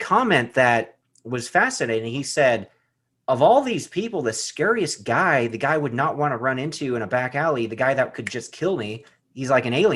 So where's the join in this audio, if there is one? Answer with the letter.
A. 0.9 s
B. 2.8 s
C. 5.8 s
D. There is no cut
B